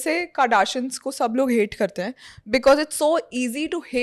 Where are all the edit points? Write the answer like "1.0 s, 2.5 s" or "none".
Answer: none